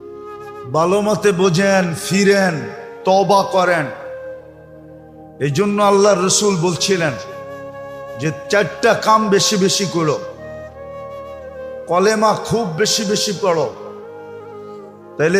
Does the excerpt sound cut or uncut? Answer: cut